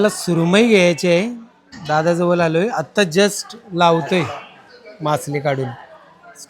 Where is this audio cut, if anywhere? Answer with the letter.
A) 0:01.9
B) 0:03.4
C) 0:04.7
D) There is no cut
D